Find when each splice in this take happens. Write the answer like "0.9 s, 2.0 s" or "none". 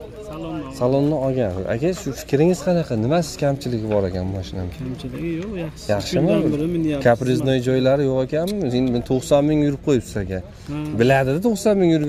none